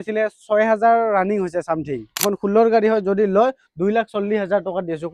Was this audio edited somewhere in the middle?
yes; 1 cut; at 2.3 s

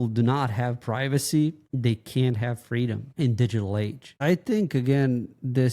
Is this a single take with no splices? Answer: no; 3 cuts; at 1.7 s, 3.1 s, 4.1 s

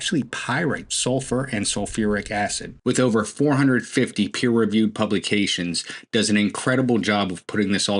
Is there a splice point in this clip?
yes; 2 cuts; at 0.9 s, 2.7 s

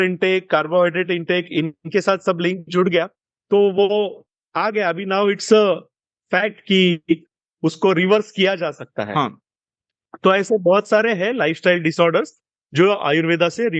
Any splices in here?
no; 0 cuts

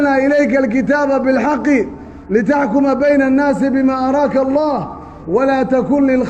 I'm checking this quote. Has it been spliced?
no; 0 cuts

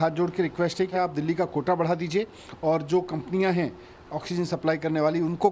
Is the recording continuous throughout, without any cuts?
no; 1 cut; at 0.9 s

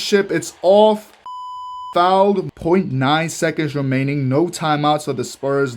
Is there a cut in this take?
yes; 2 cuts; at 1.5 s, 2.5 s

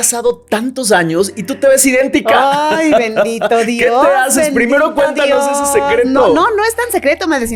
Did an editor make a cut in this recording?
no; 0 cuts

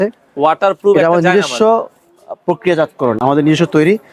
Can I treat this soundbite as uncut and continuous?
yes; 0 cuts

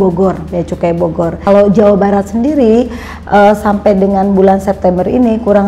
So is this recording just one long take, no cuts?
no; 1 cut; at 1.4 s

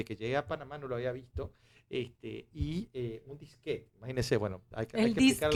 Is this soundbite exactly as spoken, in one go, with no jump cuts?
yes; 0 cuts

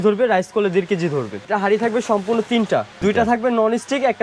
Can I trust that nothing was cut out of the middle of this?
no; 2 cuts; at 1.4 s, 2.9 s

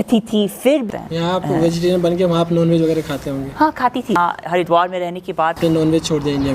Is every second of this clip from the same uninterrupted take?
no; 3 cuts; at 0.9 s, 4.2 s, 5.6 s

